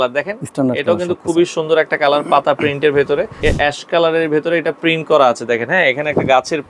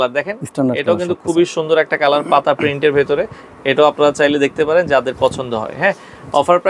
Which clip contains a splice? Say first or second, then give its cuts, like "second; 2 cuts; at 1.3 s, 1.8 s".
first; 1 cut; at 3.4 s